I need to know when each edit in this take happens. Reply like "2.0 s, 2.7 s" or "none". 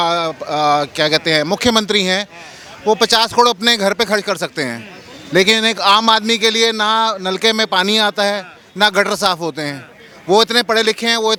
none